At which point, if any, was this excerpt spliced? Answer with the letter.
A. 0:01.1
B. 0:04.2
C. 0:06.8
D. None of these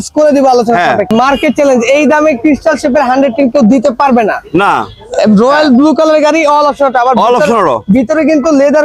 A